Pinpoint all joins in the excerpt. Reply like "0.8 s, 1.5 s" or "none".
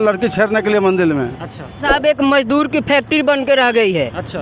1.8 s